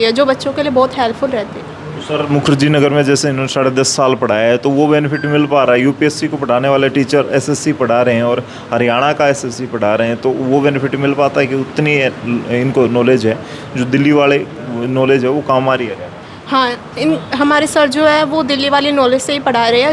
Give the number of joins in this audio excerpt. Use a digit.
0